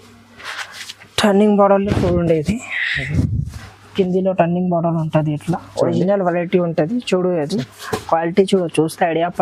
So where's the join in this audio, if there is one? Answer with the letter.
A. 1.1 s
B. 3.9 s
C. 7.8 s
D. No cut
D